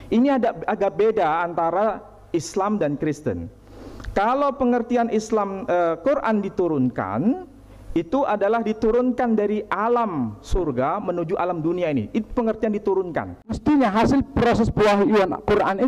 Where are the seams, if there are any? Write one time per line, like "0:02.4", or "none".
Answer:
0:13.6